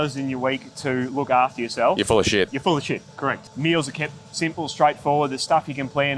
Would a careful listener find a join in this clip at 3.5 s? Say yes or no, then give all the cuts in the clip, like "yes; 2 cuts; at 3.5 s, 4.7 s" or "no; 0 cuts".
yes; 1 cut; at 3.5 s